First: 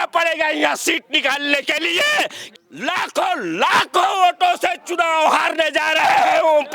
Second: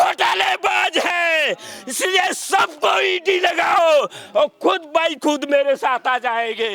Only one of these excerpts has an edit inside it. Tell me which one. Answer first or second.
first